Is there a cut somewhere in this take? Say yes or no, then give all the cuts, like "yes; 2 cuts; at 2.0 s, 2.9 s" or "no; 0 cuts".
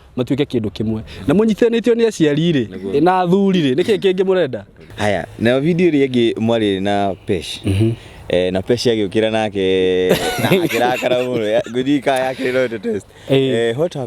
yes; 1 cut; at 4.9 s